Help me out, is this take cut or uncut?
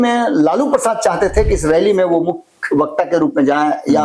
uncut